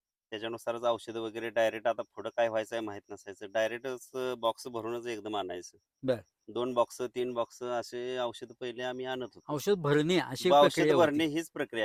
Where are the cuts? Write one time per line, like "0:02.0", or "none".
none